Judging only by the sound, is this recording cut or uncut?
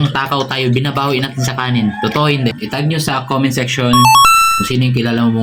cut